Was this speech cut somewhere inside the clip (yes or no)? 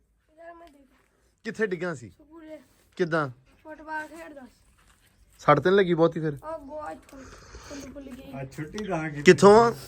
no